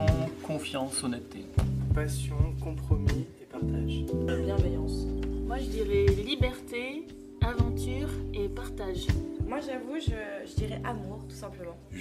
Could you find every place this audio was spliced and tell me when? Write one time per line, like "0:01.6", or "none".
none

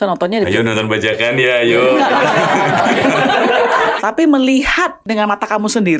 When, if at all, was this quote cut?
0:03.9
0:05.0

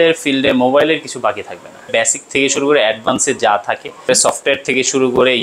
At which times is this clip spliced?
0:01.9
0:04.1

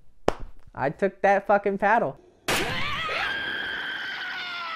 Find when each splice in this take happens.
0:02.3

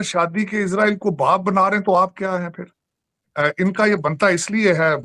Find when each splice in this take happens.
0:03.3

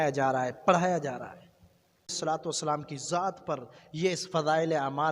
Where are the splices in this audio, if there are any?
0:02.1

